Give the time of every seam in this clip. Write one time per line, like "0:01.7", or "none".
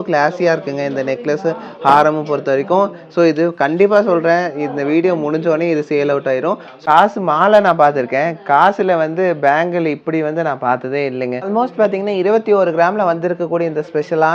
0:06.8
0:11.4

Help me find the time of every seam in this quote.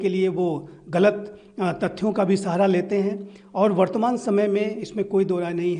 none

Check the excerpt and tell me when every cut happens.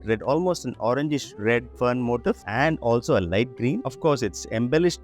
0:01.7
0:03.8

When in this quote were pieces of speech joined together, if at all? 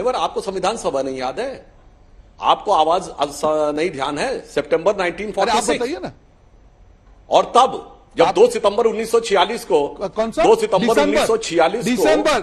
0:03.8

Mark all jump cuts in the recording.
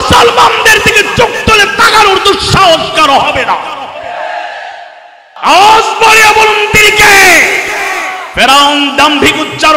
0:05.2

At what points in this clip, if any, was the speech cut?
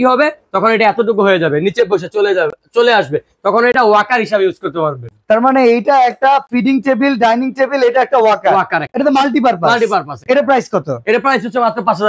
none

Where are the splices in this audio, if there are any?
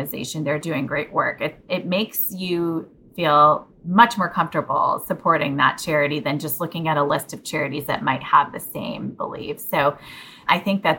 none

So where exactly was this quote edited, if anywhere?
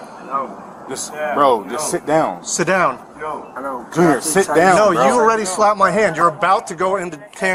none

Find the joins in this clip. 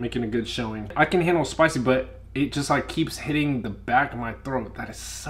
0:00.9

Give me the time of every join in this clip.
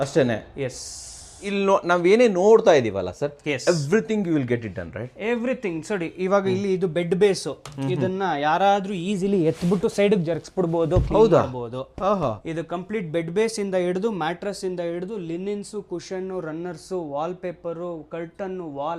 0:01.5

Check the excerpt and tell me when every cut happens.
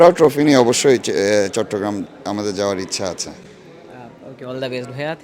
none

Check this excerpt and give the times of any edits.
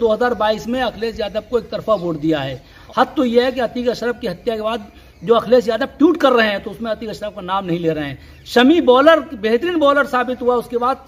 0:02.8

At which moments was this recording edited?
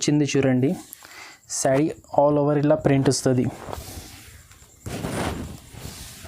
none

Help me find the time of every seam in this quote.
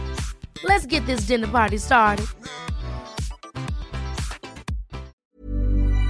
0:05.2

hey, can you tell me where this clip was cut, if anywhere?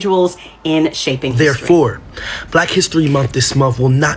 0:01.4

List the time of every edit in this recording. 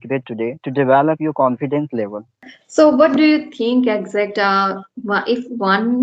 0:02.4

